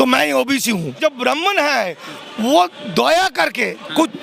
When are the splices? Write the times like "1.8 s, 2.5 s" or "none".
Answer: 1.0 s